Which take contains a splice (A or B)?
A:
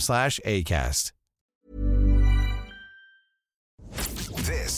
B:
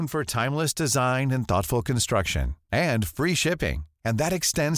A